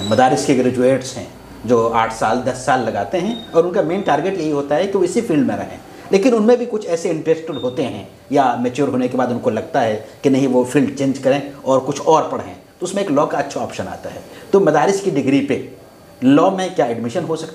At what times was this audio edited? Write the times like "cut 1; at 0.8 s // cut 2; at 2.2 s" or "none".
none